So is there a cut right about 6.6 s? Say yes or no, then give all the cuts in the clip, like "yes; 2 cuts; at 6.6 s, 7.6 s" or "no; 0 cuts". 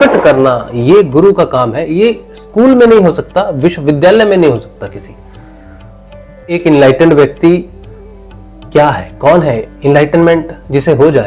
yes; 1 cut; at 6.6 s